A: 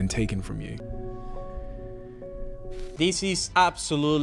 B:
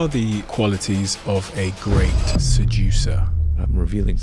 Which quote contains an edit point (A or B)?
A